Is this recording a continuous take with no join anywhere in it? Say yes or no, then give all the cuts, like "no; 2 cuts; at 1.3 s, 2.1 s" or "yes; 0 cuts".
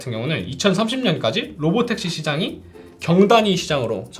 yes; 0 cuts